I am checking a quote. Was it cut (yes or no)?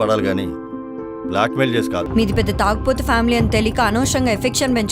yes